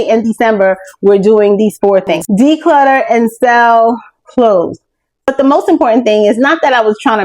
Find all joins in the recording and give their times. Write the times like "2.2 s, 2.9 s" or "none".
2.2 s, 5.3 s